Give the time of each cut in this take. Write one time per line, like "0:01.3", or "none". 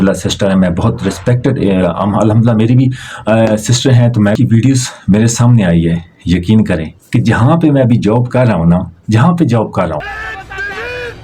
0:04.4